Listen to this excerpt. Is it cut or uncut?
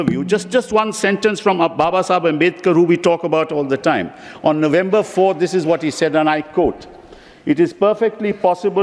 uncut